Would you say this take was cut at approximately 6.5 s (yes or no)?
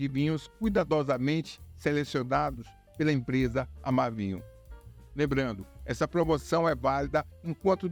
no